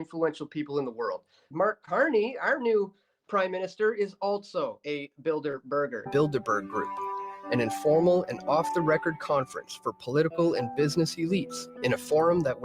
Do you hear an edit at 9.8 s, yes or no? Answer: no